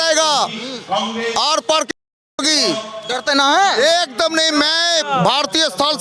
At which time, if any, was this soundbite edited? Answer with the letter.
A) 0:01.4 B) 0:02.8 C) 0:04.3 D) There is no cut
D